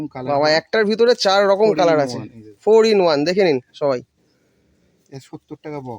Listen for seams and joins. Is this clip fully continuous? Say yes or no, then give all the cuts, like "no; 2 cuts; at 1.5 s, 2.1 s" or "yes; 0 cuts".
yes; 0 cuts